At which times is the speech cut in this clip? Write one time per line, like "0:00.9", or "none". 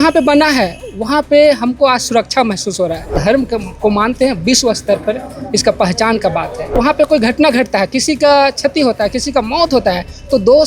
0:03.2
0:06.8